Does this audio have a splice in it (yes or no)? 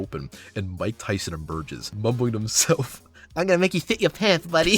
yes